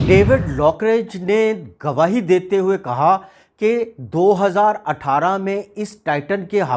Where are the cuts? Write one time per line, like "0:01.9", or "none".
none